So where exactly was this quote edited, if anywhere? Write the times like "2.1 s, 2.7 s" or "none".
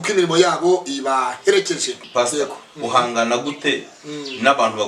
2.0 s